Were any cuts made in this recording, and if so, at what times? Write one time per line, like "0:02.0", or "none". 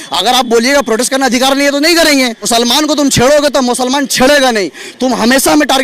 0:02.4